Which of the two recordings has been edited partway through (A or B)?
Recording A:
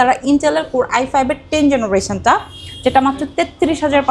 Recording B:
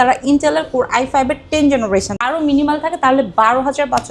B